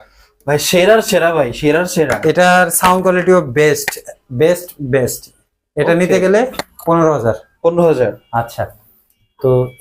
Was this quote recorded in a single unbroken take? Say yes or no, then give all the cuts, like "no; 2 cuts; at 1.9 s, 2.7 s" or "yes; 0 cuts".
yes; 0 cuts